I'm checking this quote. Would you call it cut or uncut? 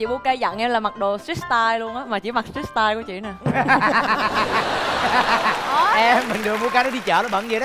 uncut